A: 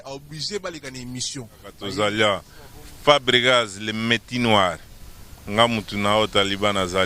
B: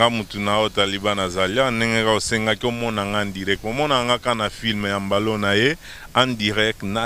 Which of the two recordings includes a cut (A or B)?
A